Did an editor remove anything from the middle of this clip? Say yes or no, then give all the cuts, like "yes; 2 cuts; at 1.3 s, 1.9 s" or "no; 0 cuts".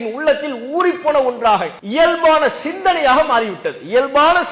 yes; 1 cut; at 1.8 s